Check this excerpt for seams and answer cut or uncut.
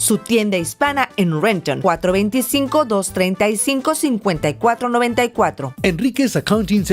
cut